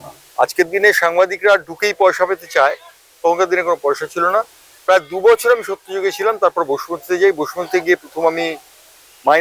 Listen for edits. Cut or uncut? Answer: uncut